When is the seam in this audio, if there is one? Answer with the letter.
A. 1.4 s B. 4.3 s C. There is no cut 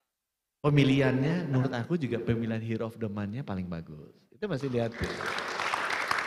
C